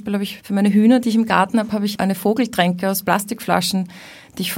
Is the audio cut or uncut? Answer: uncut